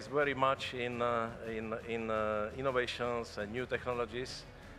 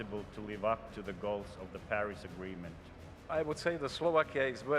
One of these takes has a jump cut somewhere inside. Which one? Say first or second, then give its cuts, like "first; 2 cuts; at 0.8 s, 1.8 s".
second; 1 cut; at 3.3 s